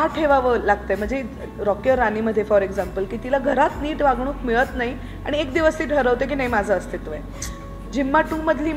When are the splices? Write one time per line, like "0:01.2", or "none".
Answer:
none